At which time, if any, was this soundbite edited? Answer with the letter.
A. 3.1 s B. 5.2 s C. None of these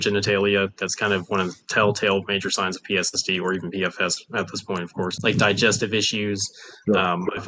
B